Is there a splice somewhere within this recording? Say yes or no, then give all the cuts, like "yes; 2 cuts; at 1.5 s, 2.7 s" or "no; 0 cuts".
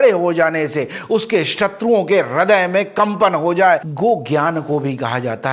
yes; 1 cut; at 3.9 s